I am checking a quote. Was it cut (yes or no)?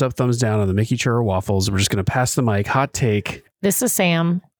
no